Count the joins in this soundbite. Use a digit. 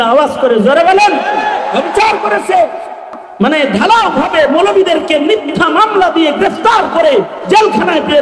1